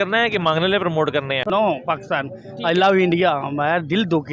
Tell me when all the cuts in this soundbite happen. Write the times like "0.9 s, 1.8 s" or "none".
1.4 s

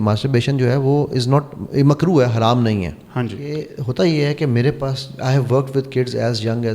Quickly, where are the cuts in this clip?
3.8 s

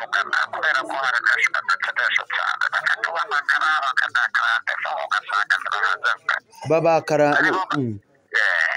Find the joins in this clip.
none

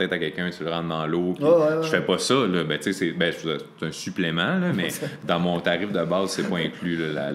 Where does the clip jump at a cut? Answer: none

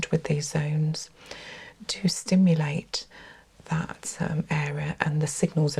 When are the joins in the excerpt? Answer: none

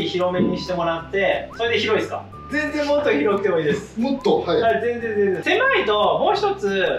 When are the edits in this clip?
1.5 s, 2.5 s, 5.4 s

